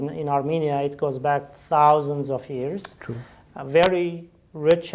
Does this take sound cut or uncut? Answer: uncut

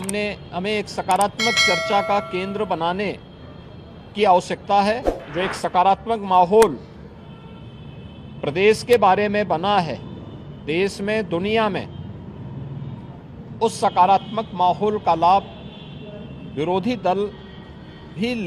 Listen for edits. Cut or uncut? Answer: cut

